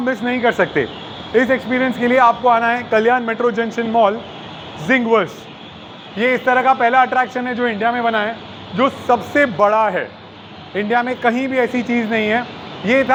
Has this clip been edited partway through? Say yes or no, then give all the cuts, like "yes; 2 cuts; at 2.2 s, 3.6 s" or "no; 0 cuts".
no; 0 cuts